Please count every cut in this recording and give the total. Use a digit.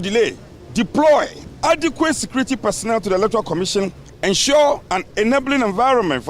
2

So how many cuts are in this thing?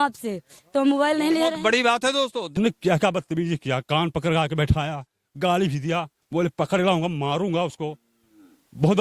1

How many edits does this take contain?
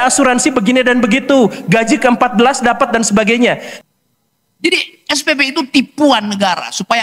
1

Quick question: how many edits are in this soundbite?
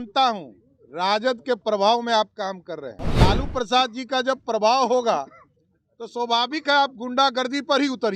1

